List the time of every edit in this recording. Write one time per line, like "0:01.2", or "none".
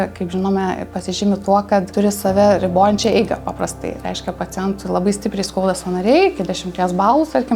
0:01.9